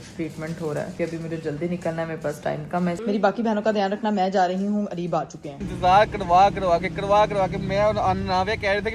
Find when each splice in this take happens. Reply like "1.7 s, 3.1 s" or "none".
0.9 s, 3.0 s, 5.6 s